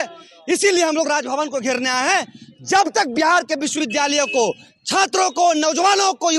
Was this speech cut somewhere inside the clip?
no; 0 cuts

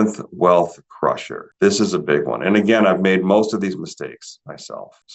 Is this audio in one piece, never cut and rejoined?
yes; 0 cuts

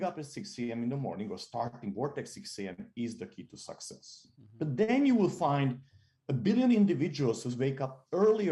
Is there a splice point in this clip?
no; 0 cuts

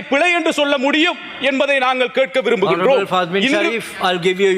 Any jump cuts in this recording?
no; 0 cuts

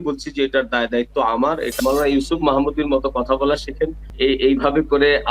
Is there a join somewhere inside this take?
yes; 1 cut; at 1.8 s

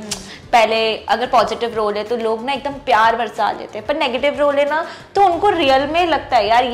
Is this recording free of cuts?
yes; 0 cuts

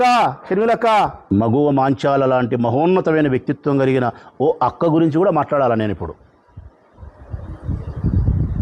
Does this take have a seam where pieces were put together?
yes; 1 cut; at 1.2 s

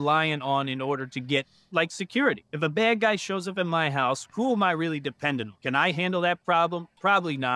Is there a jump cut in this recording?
yes; 2 cuts; at 2.5 s, 5.5 s

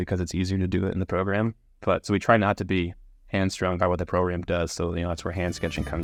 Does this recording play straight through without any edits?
yes; 0 cuts

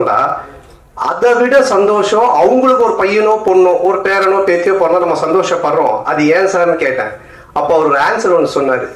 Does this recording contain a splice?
no; 0 cuts

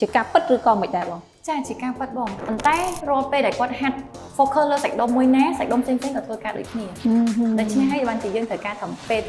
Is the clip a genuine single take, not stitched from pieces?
no; 1 cut; at 2.4 s

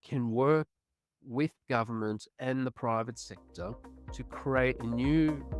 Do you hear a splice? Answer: no; 0 cuts

